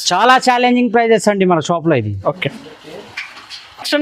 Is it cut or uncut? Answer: uncut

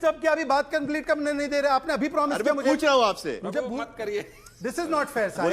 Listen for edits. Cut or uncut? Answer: cut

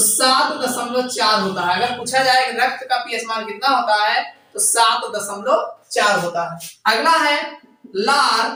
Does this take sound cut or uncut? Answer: uncut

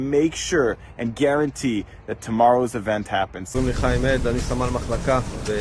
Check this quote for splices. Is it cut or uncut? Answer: cut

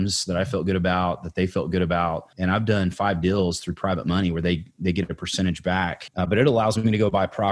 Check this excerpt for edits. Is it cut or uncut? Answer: cut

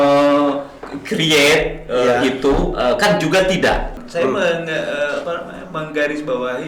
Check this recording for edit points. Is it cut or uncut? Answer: cut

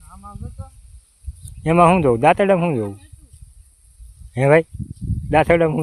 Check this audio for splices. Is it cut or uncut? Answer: uncut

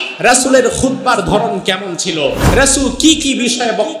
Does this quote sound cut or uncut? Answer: uncut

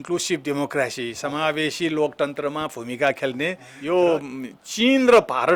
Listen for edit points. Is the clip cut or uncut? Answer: cut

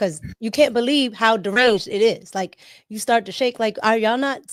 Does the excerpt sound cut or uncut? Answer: uncut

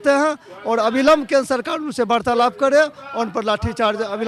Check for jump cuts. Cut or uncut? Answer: uncut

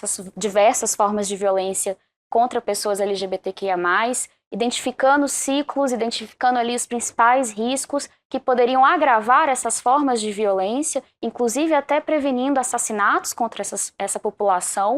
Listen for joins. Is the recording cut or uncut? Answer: uncut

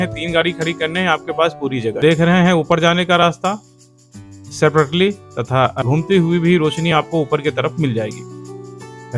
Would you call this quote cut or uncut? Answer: cut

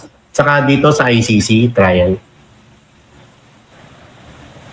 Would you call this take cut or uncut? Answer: uncut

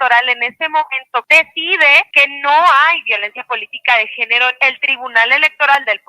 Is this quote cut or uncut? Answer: cut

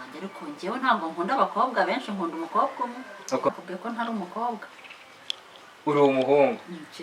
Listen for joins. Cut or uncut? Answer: cut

